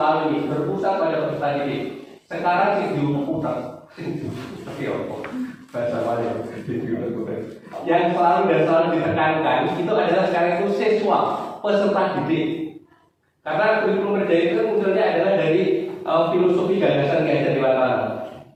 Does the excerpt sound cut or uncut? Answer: uncut